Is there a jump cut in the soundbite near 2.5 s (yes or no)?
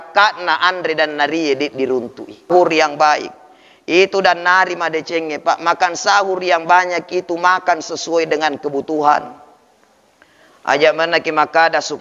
yes